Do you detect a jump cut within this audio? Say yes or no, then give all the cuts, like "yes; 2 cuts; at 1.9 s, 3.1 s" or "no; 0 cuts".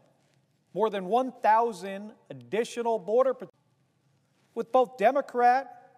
no; 0 cuts